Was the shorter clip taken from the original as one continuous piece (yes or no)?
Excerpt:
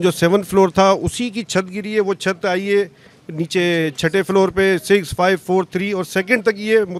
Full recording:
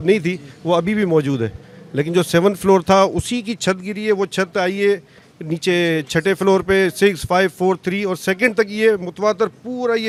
yes